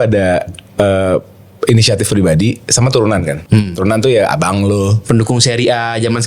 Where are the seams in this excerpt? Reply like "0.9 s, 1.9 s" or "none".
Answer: 3.4 s